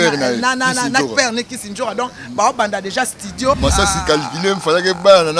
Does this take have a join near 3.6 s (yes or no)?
yes